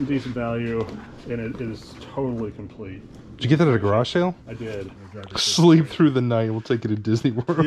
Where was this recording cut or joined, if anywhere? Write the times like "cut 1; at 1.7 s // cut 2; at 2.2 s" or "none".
cut 1; at 4.9 s